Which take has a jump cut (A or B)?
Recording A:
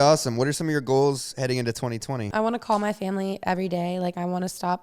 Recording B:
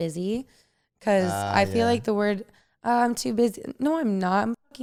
A